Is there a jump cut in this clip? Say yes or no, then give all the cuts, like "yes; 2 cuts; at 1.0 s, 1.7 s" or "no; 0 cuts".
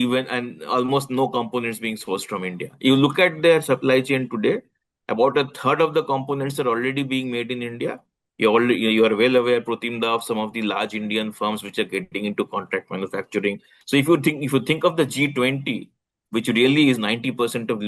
yes; 1 cut; at 13.7 s